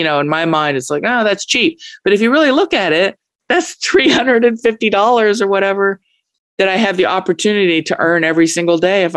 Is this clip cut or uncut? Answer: cut